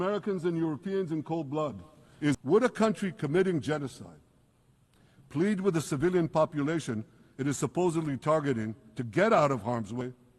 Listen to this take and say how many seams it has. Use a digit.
1